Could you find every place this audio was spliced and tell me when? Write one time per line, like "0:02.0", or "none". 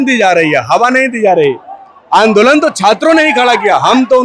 none